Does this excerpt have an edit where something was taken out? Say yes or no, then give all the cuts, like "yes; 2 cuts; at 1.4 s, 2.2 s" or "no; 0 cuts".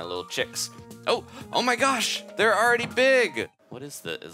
yes; 1 cut; at 3.4 s